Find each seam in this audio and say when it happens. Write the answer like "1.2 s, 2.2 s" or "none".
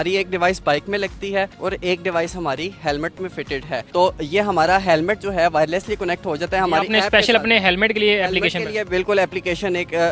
none